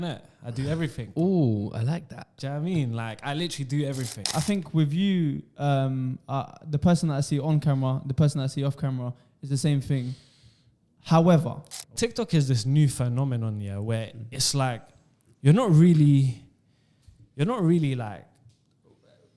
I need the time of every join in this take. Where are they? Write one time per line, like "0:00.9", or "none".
0:04.2
0:11.9